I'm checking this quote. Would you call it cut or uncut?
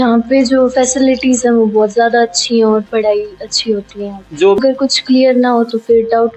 cut